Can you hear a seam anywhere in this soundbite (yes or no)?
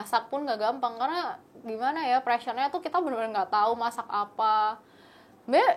no